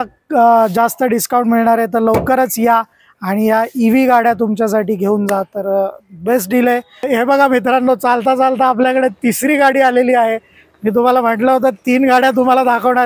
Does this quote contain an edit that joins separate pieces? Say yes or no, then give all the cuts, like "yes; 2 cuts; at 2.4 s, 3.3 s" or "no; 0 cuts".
yes; 1 cut; at 7.1 s